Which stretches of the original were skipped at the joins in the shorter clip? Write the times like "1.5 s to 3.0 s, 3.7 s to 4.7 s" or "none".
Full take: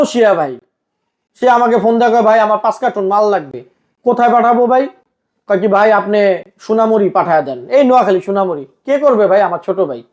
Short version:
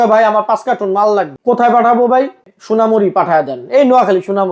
3.5 s to 3.9 s, 5.1 s to 6.5 s